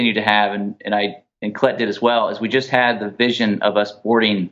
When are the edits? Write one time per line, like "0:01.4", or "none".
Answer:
none